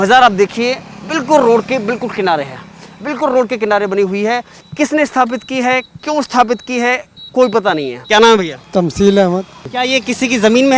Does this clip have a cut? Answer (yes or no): yes